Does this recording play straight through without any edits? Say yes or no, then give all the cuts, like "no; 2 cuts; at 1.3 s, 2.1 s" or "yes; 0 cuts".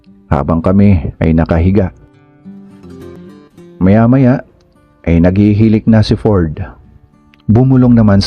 no; 1 cut; at 3.2 s